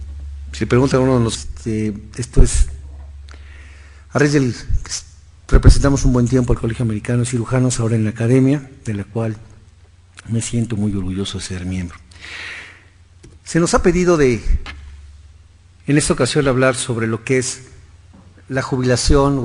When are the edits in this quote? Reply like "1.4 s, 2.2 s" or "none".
none